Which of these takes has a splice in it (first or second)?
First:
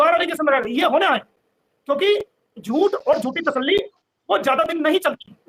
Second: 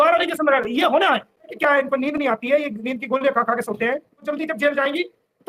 second